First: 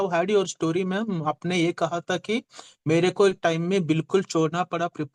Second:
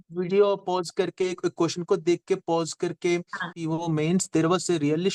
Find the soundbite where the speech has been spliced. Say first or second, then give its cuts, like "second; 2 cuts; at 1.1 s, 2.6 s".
second; 1 cut; at 3.6 s